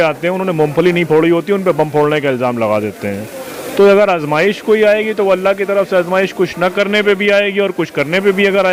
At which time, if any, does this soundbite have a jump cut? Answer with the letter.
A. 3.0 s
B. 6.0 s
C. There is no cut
C